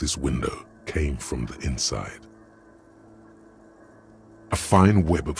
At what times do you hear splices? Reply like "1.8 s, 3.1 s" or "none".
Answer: 2.2 s, 4.5 s